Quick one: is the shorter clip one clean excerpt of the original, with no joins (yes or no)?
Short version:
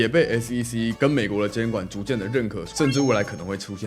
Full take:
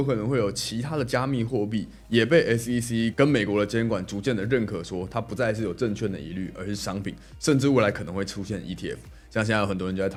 no